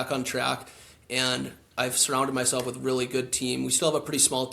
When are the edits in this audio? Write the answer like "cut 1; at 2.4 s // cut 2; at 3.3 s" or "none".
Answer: none